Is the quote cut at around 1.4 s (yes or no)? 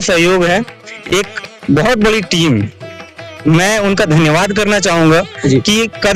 no